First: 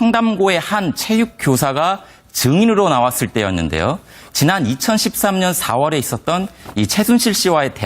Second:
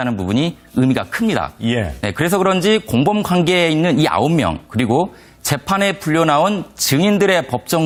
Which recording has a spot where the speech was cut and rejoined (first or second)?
first